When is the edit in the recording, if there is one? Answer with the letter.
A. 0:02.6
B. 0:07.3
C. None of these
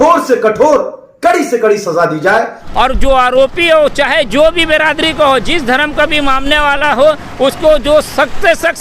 A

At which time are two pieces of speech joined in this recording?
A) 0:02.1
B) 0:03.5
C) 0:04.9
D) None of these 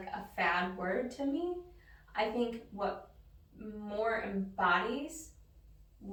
D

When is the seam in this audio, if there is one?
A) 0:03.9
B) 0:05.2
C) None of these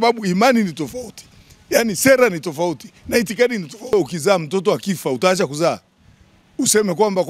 A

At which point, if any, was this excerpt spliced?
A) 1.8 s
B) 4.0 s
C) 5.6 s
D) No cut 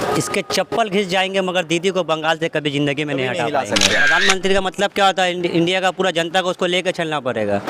B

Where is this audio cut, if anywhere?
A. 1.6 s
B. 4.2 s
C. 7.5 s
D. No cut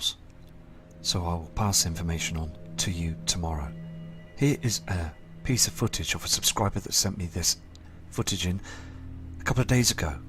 C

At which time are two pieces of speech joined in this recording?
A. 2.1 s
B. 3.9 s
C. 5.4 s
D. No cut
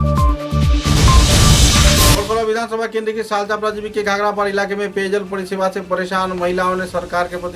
A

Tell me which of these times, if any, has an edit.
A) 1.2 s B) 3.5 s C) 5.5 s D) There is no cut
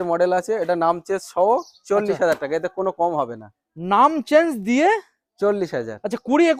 D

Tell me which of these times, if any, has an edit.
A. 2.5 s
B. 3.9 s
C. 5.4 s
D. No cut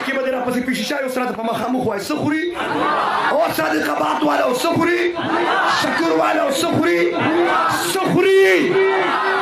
D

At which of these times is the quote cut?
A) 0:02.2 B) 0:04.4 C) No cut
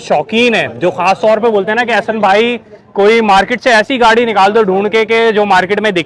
C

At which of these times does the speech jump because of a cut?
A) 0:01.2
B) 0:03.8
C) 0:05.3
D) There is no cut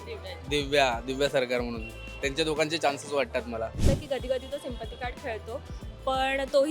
B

